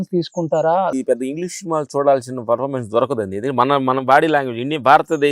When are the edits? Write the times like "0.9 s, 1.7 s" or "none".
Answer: 0.9 s